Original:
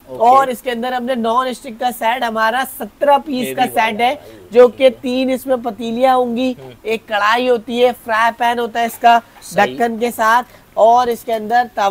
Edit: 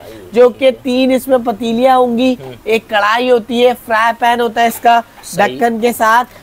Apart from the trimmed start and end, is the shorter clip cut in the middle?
no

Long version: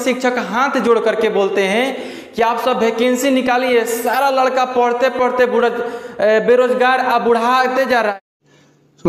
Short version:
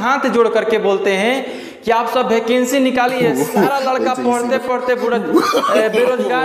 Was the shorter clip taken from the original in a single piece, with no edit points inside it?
yes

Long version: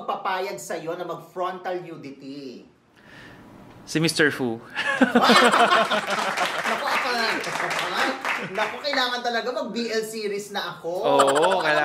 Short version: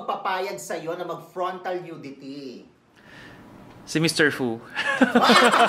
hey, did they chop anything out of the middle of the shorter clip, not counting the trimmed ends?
no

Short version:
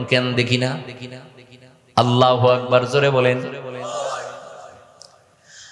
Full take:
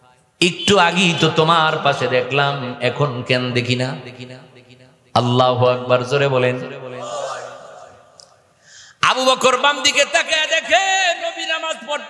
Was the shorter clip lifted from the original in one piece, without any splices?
yes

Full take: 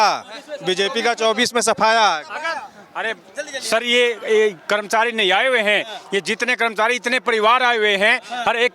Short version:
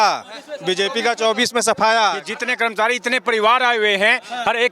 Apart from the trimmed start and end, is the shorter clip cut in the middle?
yes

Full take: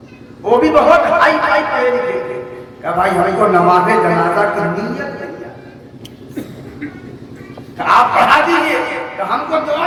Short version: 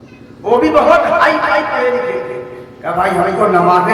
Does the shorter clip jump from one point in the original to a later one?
no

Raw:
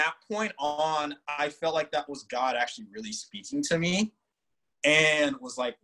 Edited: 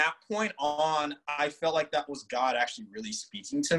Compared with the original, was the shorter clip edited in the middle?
no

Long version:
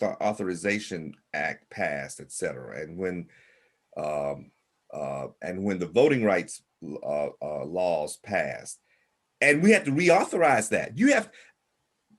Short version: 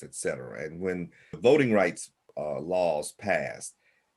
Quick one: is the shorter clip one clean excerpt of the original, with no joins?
no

